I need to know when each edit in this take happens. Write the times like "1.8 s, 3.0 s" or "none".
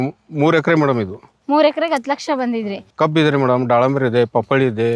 2.8 s